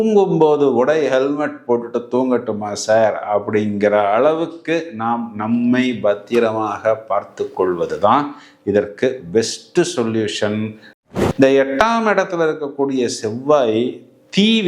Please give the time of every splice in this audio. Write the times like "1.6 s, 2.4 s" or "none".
10.9 s